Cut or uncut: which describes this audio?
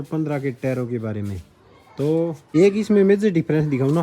cut